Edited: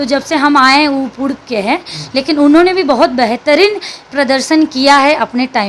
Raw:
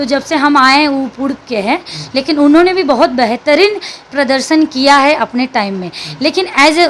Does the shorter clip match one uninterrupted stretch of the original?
yes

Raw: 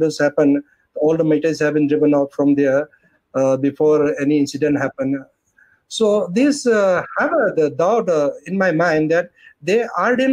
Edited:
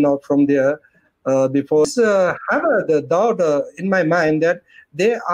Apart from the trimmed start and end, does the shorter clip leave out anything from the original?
yes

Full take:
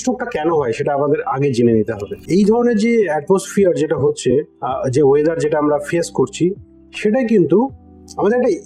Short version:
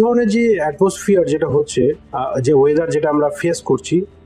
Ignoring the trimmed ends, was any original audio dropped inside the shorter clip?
no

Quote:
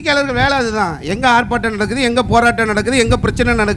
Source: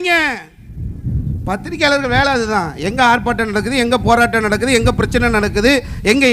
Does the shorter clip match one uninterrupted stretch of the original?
yes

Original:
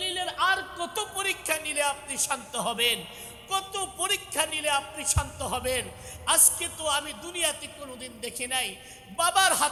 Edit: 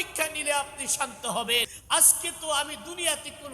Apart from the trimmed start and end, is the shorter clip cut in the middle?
yes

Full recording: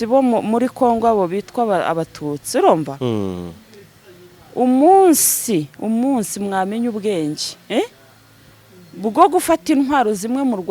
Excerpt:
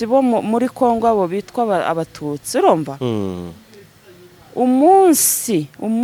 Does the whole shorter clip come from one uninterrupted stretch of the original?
yes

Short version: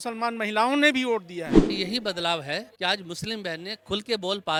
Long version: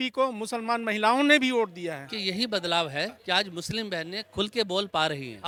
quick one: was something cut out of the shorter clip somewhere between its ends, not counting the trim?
no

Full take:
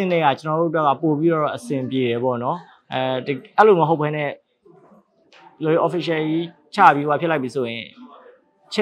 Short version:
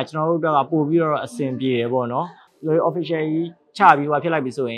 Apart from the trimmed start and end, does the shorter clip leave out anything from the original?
yes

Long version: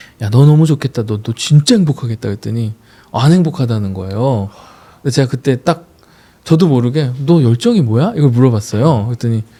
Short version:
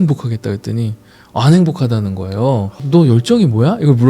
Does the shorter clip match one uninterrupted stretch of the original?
no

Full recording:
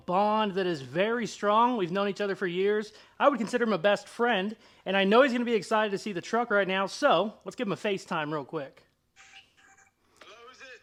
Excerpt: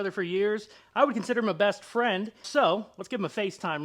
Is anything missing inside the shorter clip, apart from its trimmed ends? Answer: yes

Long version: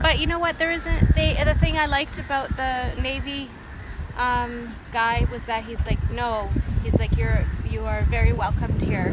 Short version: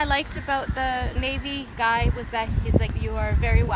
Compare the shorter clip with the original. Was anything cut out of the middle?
yes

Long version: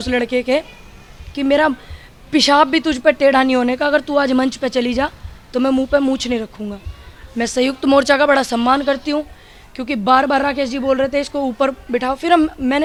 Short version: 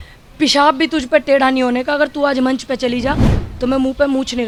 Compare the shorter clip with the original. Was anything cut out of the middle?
no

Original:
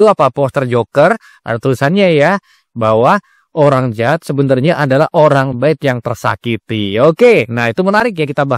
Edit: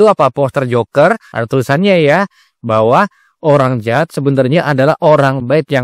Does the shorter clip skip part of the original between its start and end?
yes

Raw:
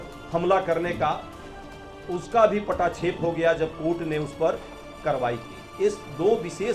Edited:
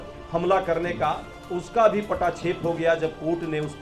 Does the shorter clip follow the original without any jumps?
no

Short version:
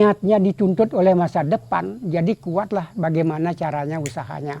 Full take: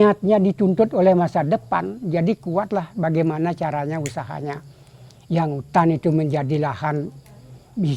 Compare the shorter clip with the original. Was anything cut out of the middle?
no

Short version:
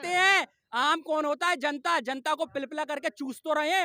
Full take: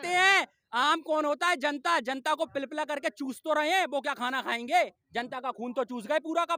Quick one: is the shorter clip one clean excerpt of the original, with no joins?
yes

